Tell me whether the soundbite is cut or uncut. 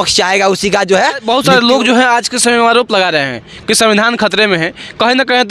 cut